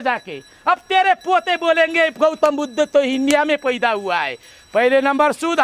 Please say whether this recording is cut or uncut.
uncut